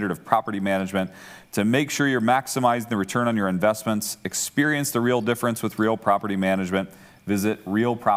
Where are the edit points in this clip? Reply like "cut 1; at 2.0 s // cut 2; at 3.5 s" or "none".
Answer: none